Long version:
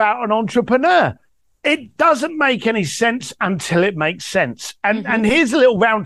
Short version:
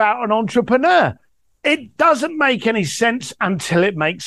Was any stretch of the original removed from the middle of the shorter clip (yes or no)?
no